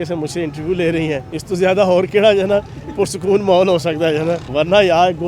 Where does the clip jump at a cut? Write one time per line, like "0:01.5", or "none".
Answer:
0:01.3
0:04.4